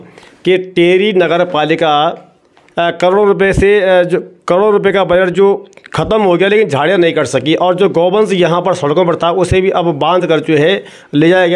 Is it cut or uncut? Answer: uncut